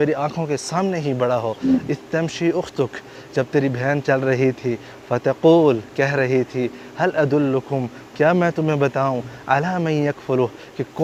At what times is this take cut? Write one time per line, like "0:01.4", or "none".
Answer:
none